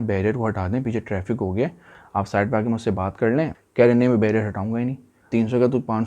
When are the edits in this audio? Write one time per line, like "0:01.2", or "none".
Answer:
0:01.9
0:03.6
0:05.3